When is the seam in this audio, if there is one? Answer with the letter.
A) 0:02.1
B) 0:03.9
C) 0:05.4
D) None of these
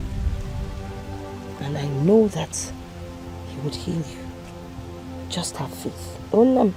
D